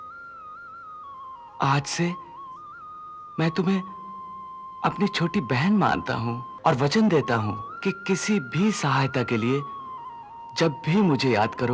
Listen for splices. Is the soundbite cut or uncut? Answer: cut